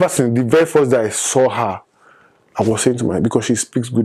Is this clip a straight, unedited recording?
yes; 0 cuts

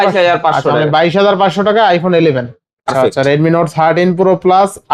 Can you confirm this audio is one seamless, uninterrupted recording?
no; 1 cut; at 2.9 s

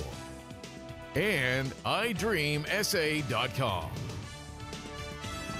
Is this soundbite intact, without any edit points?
yes; 0 cuts

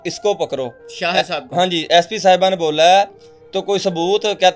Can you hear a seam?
no; 0 cuts

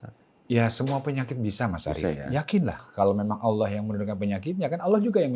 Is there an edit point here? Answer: yes; 1 cut; at 2.8 s

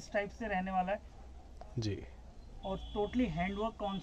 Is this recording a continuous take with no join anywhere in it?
yes; 0 cuts

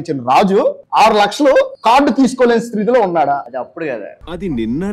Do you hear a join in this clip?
yes; 3 cuts; at 0.8 s, 1.8 s, 3.5 s

